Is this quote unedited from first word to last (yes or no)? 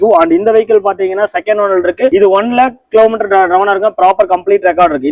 yes